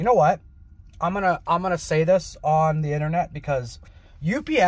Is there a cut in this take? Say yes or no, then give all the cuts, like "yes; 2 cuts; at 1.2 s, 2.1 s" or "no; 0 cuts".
yes; 1 cut; at 3.7 s